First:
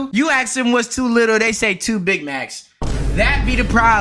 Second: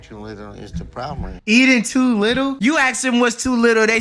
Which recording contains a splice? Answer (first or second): second